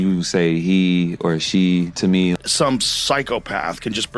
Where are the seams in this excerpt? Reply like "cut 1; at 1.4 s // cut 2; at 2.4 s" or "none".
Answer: cut 1; at 2.3 s